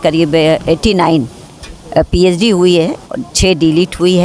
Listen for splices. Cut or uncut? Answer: uncut